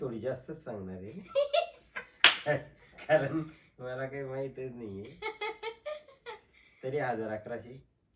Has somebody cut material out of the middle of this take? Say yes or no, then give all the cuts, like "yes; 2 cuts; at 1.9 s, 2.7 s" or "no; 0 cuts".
no; 0 cuts